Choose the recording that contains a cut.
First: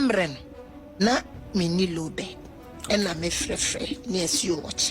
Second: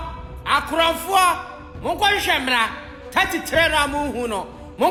first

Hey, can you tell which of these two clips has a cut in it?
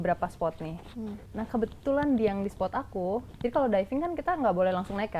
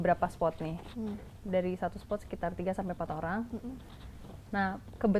first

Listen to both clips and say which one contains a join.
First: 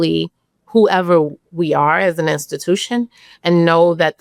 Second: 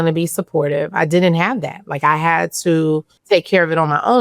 second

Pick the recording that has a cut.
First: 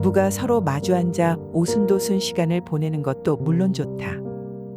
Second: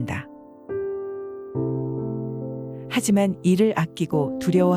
first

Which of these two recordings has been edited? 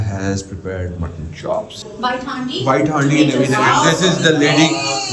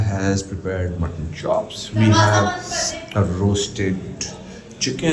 first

